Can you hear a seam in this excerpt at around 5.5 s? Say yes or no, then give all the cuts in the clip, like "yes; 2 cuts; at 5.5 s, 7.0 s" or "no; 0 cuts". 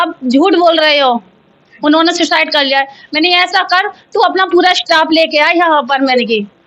no; 0 cuts